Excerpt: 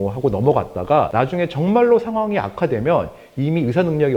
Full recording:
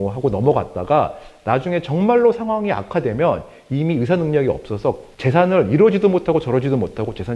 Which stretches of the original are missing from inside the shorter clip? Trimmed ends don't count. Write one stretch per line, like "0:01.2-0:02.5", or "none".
0:01.1-0:01.4